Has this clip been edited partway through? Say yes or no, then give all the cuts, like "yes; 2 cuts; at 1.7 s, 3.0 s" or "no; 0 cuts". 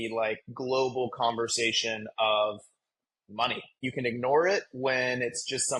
yes; 1 cut; at 3.8 s